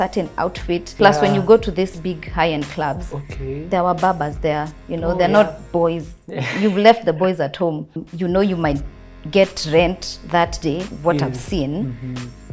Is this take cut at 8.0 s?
yes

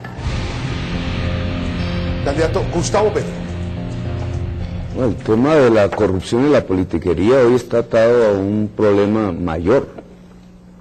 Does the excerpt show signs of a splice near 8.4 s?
yes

